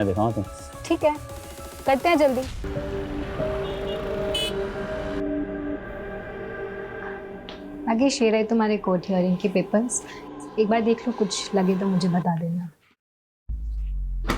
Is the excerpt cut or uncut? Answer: cut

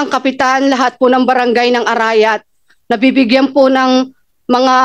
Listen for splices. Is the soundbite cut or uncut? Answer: uncut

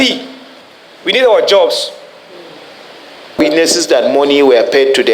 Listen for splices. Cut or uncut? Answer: cut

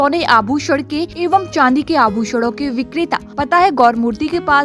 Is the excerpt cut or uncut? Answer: cut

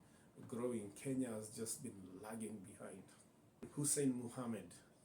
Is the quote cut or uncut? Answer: cut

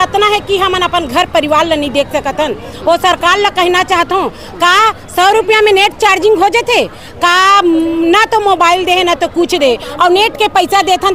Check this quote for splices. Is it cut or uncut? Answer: uncut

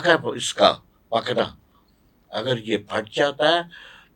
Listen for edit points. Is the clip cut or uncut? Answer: uncut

